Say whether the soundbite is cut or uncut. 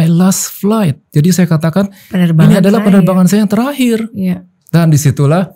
uncut